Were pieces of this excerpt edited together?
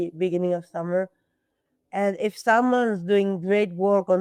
no; 0 cuts

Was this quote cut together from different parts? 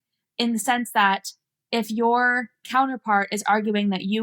yes; 1 cut; at 2.7 s

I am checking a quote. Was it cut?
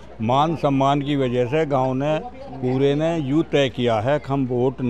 no; 0 cuts

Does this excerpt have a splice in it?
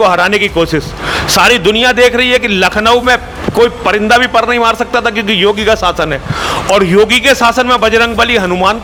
no; 0 cuts

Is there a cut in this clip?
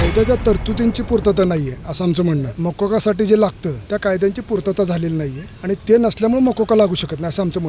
yes; 3 cuts; at 2.5 s, 3.7 s, 5.4 s

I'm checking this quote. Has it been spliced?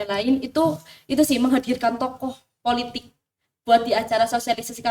no; 0 cuts

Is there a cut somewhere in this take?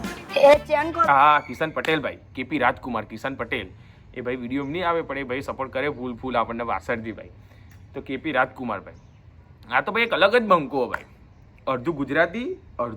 yes; 1 cut; at 1.1 s

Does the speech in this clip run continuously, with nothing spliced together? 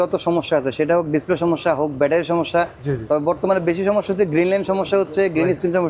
yes; 0 cuts

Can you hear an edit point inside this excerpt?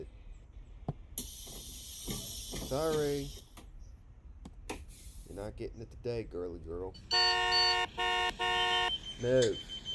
yes; 1 cut; at 7.0 s

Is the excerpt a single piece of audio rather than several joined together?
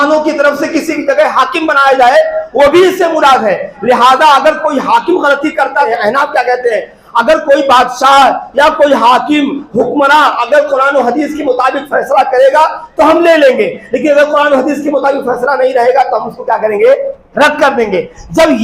no; 1 cut; at 5.9 s

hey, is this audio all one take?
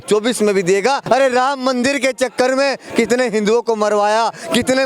no; 1 cut; at 1.0 s

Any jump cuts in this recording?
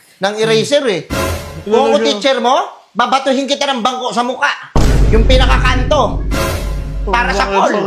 no; 0 cuts

